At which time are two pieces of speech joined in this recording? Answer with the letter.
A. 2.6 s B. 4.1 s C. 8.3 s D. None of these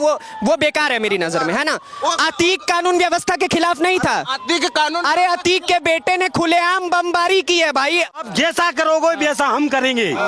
C